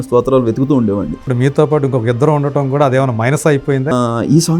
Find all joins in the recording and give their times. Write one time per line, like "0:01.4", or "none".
0:01.3
0:03.9